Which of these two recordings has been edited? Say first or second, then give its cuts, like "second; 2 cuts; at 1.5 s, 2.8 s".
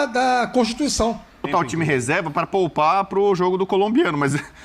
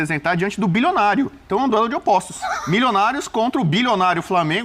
first; 1 cut; at 1.5 s